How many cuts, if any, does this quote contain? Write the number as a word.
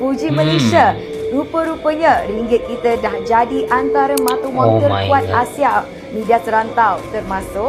one